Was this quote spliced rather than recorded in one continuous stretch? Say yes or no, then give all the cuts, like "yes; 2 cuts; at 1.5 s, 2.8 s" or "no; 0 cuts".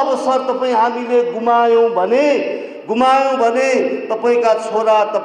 no; 0 cuts